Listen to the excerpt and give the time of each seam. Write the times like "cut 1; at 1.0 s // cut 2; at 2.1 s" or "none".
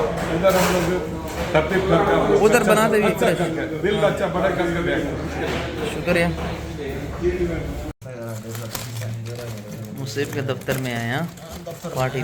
cut 1; at 7.8 s